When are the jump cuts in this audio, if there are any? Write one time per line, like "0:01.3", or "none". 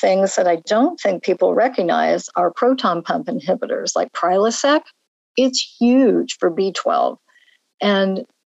0:01.5